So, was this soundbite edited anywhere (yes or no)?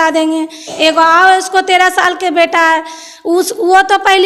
no